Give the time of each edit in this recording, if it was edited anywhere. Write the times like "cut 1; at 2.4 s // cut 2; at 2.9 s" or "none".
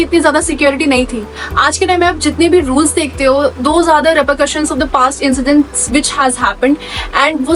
none